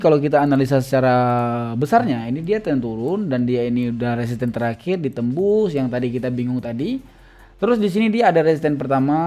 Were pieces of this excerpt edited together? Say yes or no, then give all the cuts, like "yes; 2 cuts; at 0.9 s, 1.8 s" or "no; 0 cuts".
no; 0 cuts